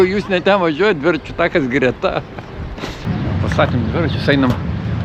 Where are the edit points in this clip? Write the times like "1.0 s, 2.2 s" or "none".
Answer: 3.0 s